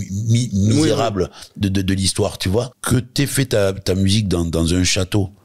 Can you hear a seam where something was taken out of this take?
yes; 1 cut; at 2.7 s

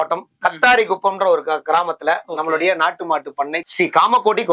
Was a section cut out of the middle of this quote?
yes; 1 cut; at 3.6 s

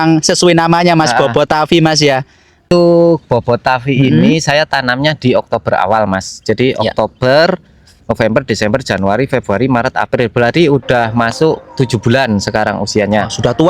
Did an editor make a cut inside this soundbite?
yes; 1 cut; at 2.7 s

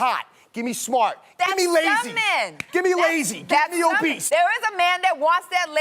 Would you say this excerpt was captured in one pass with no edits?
no; 1 cut; at 4.2 s

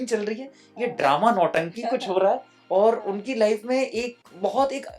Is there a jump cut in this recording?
no; 0 cuts

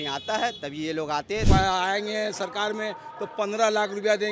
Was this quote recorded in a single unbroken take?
no; 1 cut; at 1.5 s

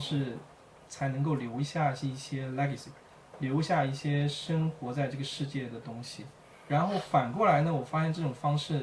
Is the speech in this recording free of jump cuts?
yes; 0 cuts

